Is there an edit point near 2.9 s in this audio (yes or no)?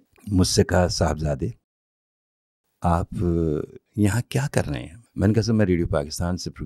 no